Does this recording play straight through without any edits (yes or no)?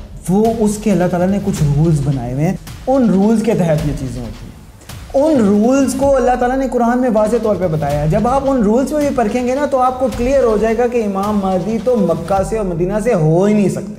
no